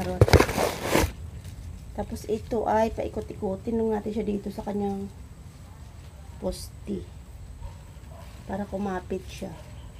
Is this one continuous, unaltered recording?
no; 1 cut; at 1.1 s

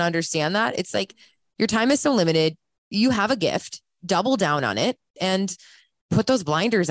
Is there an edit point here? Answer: yes; 1 cut; at 5.1 s

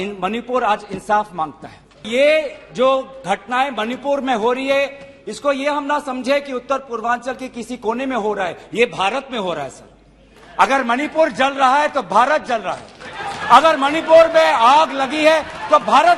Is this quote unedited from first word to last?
no; 1 cut; at 2.1 s

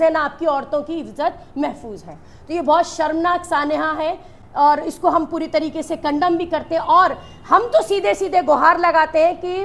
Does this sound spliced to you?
no; 0 cuts

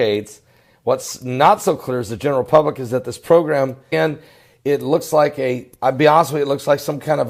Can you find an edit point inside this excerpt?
no; 0 cuts

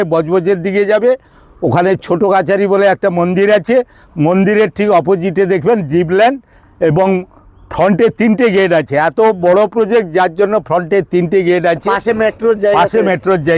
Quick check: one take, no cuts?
yes; 0 cuts

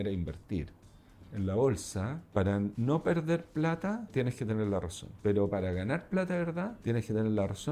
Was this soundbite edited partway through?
yes; 6 cuts; at 1.2 s, 2.2 s, 2.7 s, 4.1 s, 5.0 s, 6.8 s

